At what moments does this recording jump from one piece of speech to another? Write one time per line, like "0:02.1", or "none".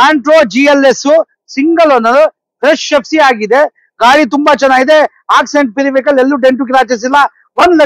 none

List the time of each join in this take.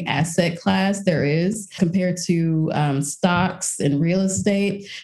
0:01.7

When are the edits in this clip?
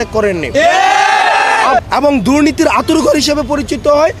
0:01.8

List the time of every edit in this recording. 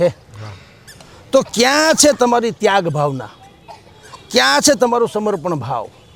none

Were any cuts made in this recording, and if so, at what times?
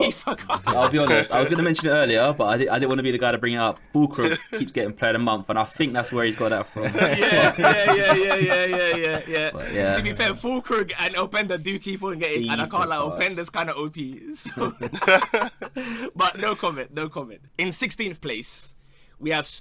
none

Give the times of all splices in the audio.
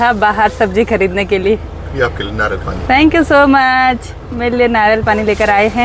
none

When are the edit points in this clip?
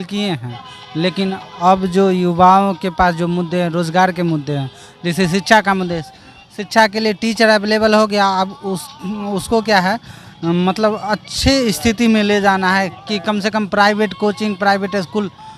none

